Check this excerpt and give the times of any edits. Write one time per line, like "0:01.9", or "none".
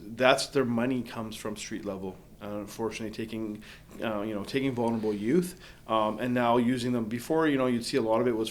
none